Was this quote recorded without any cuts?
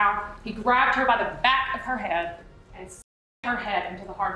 yes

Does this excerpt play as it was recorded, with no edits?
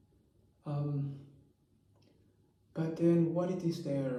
yes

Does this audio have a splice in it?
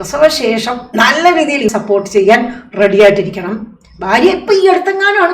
yes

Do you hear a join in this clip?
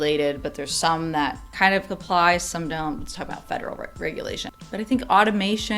yes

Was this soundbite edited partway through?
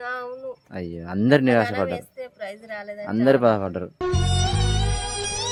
no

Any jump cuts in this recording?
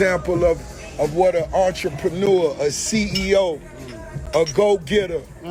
no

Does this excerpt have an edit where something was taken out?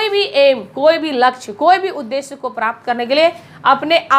no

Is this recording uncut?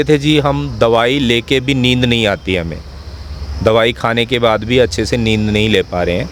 yes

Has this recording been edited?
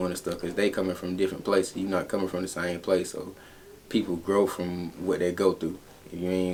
no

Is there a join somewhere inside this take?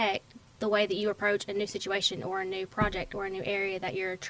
no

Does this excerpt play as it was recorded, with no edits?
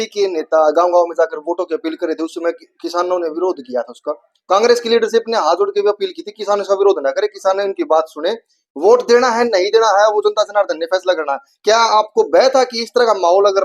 yes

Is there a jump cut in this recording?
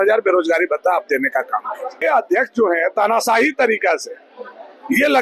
yes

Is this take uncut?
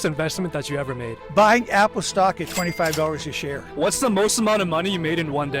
no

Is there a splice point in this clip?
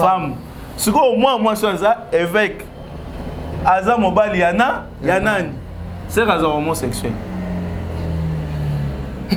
no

